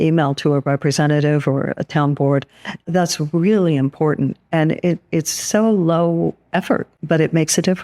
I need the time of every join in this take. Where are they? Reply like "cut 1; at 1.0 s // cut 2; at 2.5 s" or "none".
cut 1; at 2.9 s // cut 2; at 7.0 s

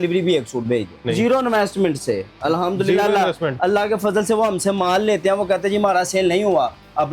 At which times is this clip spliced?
cut 1; at 1.1 s

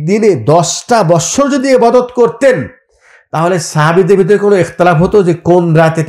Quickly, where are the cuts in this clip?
none

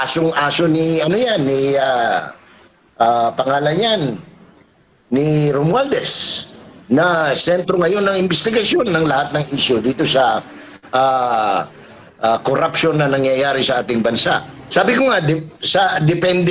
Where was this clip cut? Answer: cut 1; at 14.6 s

